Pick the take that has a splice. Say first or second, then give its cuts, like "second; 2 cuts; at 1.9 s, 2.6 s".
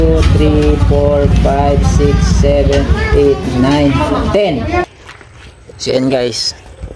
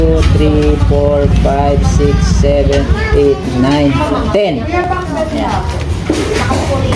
first; 1 cut; at 4.9 s